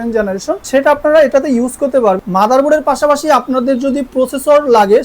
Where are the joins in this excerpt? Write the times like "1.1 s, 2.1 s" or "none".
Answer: 2.2 s